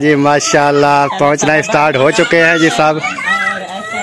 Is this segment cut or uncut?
uncut